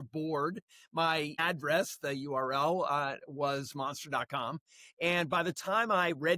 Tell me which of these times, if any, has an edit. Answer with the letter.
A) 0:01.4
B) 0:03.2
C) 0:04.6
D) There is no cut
A